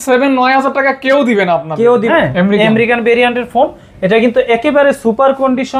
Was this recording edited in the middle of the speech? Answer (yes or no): yes